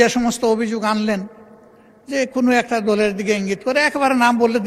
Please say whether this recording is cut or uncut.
uncut